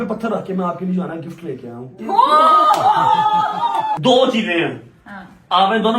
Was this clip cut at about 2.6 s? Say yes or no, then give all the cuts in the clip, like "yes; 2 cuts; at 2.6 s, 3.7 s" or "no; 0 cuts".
no; 1 cut; at 3.9 s